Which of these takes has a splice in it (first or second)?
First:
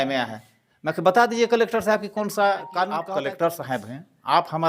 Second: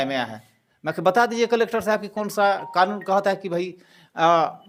first